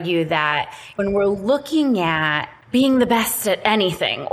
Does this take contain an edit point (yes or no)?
no